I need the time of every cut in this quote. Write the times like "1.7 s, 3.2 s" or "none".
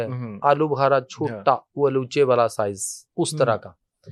none